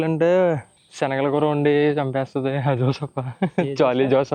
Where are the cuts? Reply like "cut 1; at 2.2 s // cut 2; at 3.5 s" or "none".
none